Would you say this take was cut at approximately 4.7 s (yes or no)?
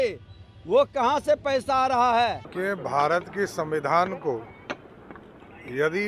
no